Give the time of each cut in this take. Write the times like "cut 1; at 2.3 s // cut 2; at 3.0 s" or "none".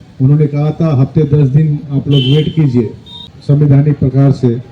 cut 1; at 3.3 s

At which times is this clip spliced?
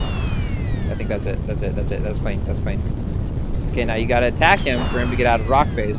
none

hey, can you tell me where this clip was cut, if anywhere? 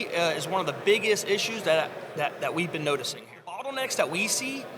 cut 1; at 3.6 s

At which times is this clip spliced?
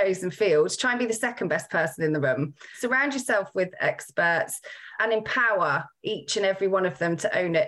cut 1; at 2.8 s // cut 2; at 4.9 s

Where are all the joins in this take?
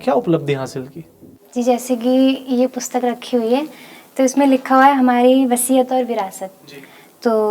none

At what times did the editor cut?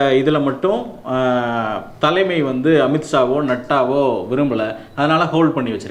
none

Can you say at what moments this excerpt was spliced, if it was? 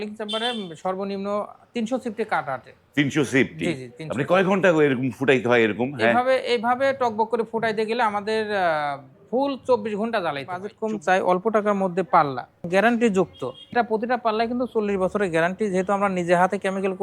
cut 1; at 10.7 s // cut 2; at 12.7 s // cut 3; at 13.7 s

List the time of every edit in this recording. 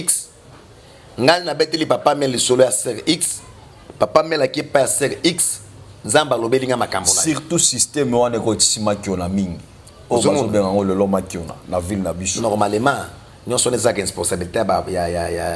none

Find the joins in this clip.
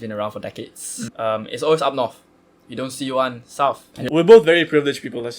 cut 1; at 1.1 s // cut 2; at 3.9 s

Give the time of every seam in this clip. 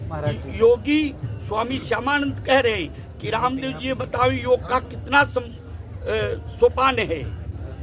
none

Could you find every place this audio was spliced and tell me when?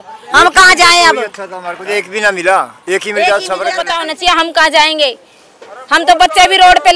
cut 1; at 3.8 s

